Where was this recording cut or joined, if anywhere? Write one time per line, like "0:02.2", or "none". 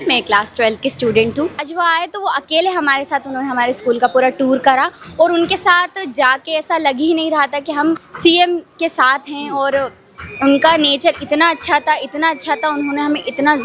0:01.7